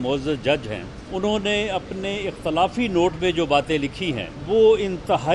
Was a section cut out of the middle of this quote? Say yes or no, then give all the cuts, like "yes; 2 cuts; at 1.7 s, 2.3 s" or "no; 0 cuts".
yes; 2 cuts; at 1.0 s, 4.3 s